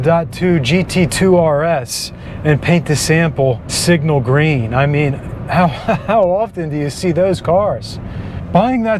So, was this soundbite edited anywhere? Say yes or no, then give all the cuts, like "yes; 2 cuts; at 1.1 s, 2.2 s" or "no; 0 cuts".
no; 0 cuts